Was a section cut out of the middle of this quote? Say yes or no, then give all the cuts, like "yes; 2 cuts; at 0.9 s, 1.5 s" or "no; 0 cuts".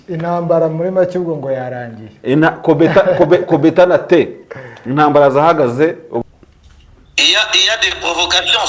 yes; 1 cut; at 6.1 s